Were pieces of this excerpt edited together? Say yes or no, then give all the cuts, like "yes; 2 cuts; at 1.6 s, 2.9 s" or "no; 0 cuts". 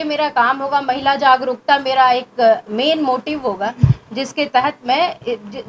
no; 0 cuts